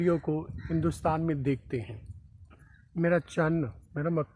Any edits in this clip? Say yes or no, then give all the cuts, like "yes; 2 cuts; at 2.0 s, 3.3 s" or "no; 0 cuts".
no; 0 cuts